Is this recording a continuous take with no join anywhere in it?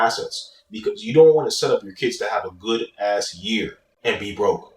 no; 1 cut; at 3.9 s

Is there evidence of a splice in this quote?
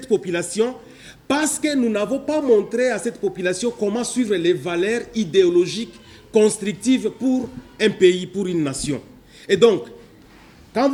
no; 0 cuts

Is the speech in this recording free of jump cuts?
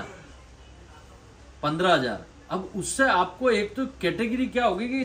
yes; 0 cuts

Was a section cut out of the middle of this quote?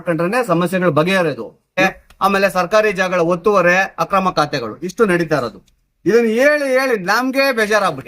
yes; 1 cut; at 1.8 s

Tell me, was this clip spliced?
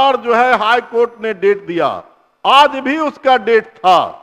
no; 0 cuts

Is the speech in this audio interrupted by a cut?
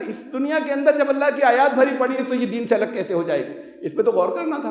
no; 0 cuts

